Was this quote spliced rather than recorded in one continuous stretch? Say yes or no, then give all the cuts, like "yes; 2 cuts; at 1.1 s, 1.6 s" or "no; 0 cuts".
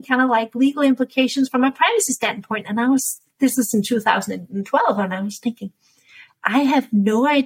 no; 0 cuts